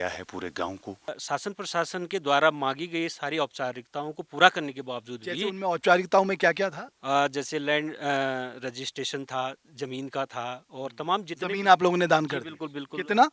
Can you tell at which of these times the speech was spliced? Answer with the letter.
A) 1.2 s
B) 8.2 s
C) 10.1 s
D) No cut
A